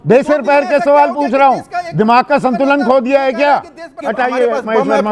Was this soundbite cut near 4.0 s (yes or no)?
yes